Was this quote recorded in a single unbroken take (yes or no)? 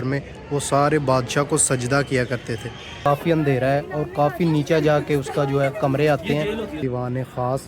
no